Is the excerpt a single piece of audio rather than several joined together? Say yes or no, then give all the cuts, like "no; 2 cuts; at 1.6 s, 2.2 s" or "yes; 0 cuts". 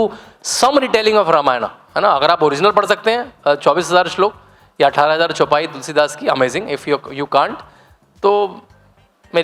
yes; 0 cuts